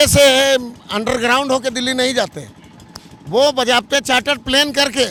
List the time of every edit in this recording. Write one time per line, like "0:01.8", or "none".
none